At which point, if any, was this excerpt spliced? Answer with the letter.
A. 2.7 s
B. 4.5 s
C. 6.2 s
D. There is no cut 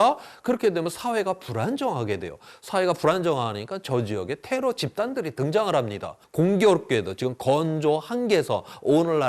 C